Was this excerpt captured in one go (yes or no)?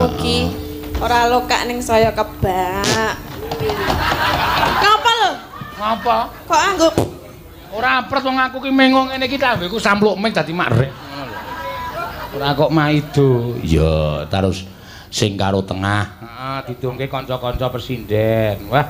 yes